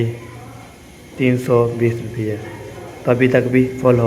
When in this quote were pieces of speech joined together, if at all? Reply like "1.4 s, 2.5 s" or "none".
none